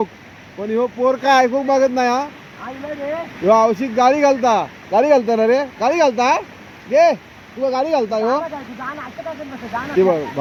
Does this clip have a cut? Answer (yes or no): no